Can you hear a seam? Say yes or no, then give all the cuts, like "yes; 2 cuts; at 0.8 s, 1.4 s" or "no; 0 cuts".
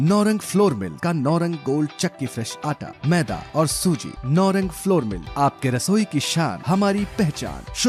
no; 0 cuts